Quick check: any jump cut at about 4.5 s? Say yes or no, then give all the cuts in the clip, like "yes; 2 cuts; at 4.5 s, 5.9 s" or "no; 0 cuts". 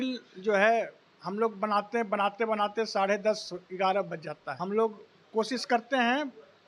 yes; 1 cut; at 4.5 s